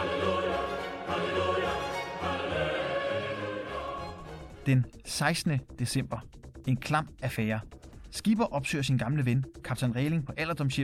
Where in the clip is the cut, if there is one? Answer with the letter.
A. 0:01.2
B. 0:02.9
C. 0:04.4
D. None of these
C